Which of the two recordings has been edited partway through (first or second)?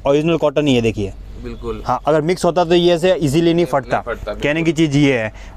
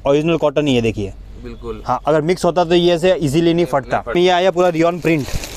second